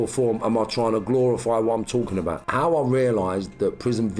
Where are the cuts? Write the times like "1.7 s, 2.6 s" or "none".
2.4 s